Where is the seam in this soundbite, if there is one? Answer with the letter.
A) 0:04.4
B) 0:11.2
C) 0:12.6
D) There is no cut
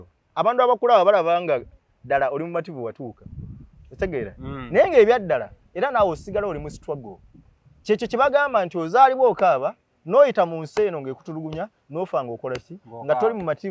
D